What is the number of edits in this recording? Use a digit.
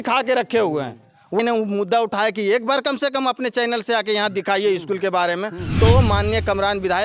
1